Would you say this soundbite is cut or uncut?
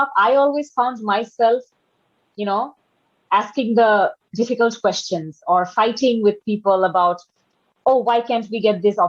uncut